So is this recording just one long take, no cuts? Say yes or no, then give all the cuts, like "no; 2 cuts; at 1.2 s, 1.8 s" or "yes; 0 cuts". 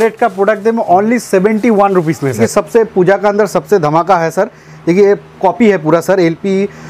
no; 1 cut; at 2.4 s